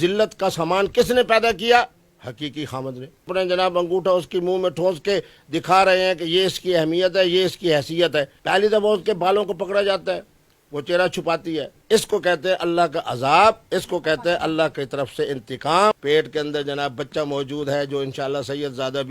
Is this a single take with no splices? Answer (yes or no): no